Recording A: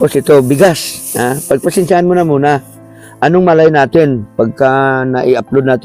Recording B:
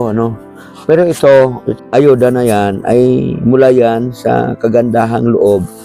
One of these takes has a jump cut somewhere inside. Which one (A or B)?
B